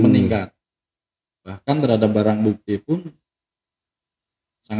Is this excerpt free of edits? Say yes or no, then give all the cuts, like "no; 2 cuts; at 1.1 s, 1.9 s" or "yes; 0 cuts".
yes; 0 cuts